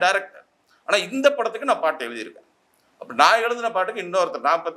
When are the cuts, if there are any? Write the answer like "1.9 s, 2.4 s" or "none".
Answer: none